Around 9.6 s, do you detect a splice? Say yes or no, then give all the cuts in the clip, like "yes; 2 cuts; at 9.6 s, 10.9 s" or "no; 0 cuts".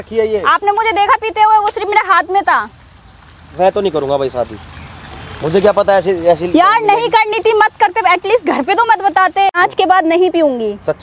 yes; 1 cut; at 9.6 s